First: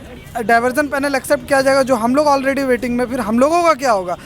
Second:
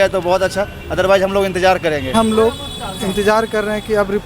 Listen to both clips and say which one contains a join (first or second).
second